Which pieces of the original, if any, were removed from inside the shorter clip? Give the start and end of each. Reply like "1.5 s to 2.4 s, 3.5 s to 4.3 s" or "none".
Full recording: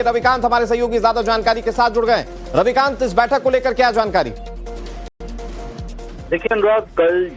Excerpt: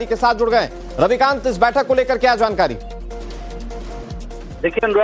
5.1 s to 5.2 s

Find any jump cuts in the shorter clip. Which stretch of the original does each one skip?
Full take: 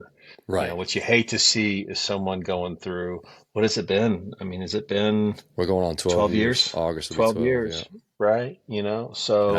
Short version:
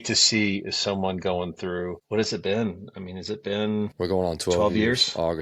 3.2 s to 3.4 s, 5.4 s to 5.5 s

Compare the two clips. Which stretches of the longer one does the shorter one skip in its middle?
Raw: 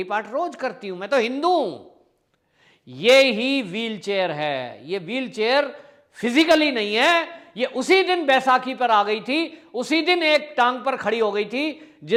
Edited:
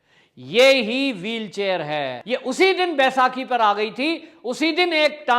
4.6 s to 7.4 s

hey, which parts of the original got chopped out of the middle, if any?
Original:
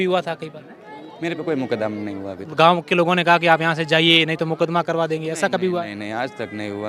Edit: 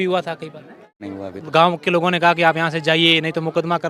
1.0 s to 2.1 s

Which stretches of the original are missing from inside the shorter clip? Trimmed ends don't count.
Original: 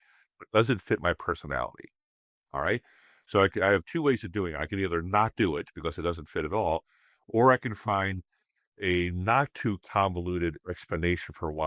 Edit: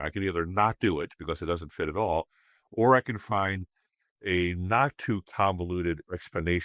none

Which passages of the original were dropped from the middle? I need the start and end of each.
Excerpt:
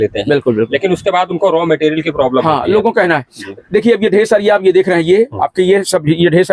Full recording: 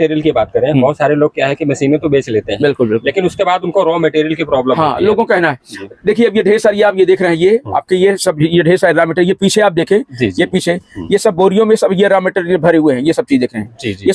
none

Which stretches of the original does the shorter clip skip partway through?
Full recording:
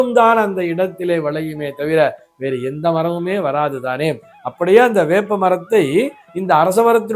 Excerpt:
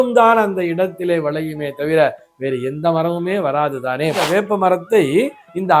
4.2 s to 5.0 s

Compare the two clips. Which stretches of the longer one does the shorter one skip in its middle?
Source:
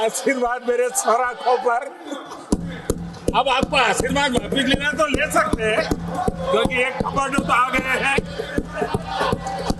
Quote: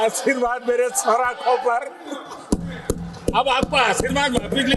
none

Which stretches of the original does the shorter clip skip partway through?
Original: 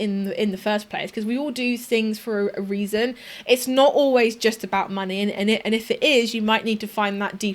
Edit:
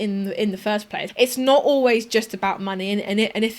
1.0 s to 3.3 s

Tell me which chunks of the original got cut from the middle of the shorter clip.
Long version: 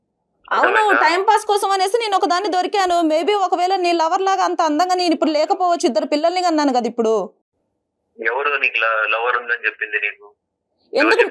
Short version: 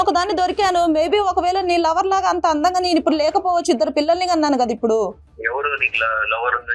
7.4 s to 8.1 s

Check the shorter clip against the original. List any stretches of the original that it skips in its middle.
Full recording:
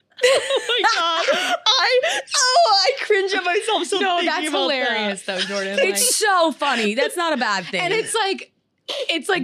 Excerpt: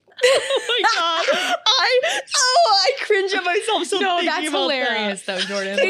none

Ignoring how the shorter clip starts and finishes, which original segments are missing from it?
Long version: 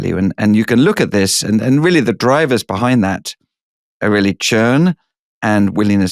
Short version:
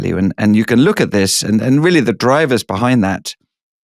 none

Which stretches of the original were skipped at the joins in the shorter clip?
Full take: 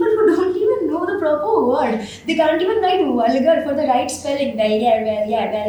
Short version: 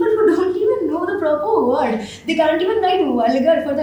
none

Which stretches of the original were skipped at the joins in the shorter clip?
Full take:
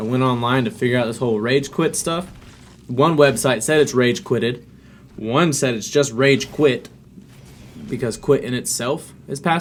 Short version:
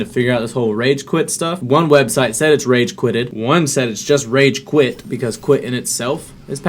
2.2 s to 2.9 s, 4.6 s to 5.2 s, 6.9 s to 7.8 s

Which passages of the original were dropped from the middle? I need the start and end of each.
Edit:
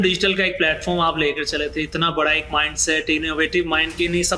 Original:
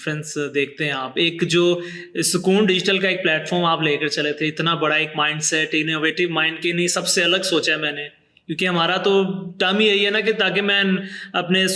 none

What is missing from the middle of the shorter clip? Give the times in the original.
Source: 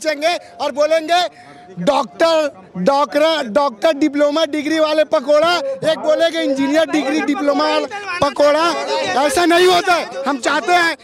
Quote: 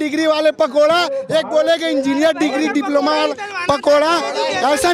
none

